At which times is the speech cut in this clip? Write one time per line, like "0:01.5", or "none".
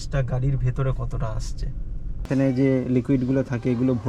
0:02.3

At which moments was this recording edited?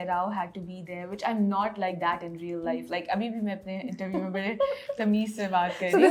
none

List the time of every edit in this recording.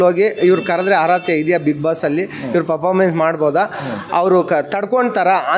none

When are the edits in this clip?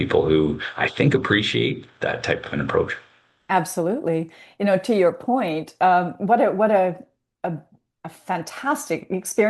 none

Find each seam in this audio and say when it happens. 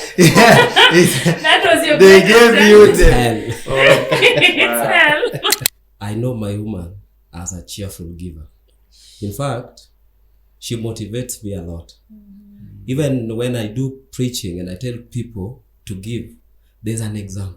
0:05.6

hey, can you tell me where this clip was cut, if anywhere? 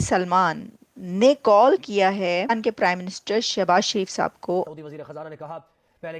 0:02.5
0:04.7

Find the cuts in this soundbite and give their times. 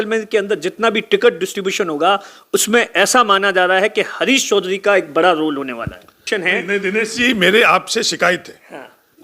0:06.2

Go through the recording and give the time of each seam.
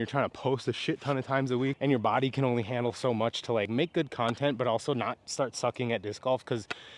none

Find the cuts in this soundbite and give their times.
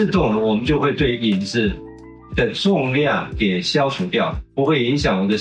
0:04.4

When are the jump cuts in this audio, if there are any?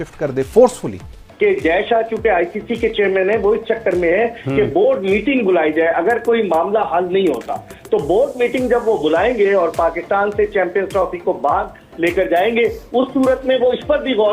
0:01.2

